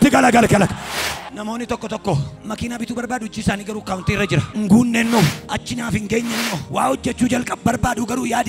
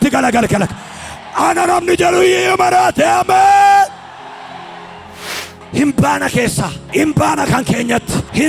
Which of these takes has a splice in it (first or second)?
first